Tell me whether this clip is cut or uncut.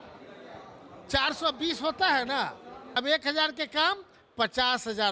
cut